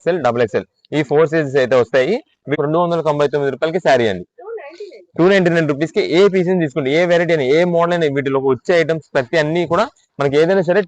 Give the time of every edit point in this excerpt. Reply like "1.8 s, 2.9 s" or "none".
2.6 s

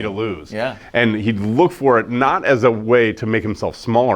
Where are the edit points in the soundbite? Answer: none

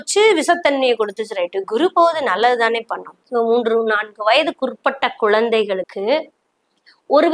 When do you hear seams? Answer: 3.1 s

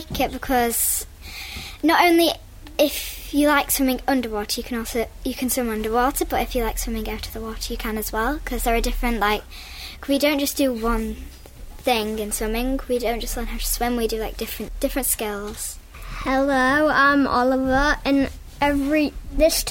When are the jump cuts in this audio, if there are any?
15.8 s

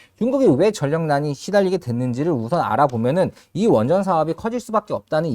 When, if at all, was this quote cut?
none

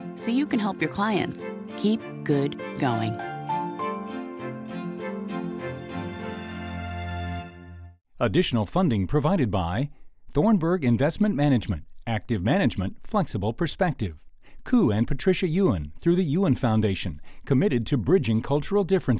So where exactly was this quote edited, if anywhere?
none

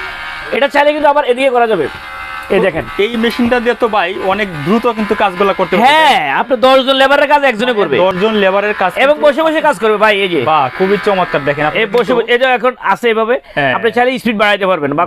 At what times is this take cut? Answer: none

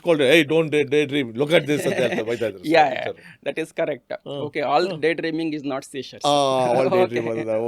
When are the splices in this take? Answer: none

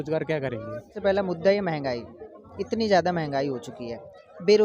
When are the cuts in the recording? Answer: 0.9 s

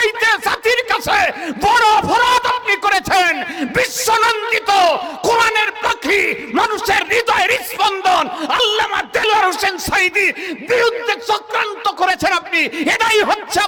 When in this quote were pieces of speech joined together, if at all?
none

